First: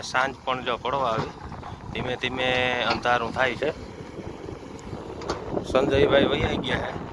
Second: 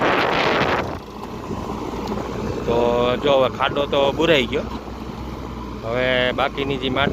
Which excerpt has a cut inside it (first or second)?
second